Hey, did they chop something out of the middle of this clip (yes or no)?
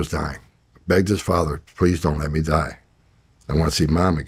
no